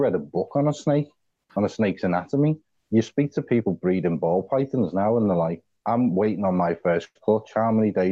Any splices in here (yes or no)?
yes